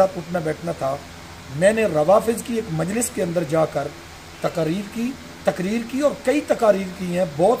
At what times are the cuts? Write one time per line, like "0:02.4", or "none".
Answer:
none